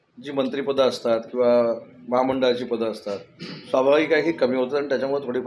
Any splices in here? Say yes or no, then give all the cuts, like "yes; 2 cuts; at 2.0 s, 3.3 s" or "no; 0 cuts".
no; 0 cuts